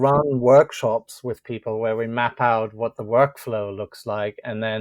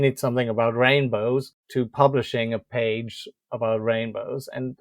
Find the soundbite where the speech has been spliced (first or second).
second